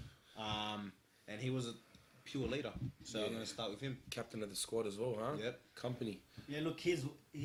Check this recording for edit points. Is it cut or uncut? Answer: uncut